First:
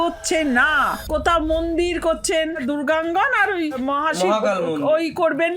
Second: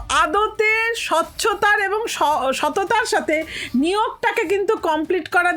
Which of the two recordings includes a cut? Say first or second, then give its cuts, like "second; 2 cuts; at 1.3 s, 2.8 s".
first; 3 cuts; at 0.9 s, 2.6 s, 3.8 s